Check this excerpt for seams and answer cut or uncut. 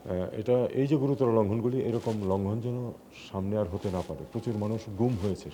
uncut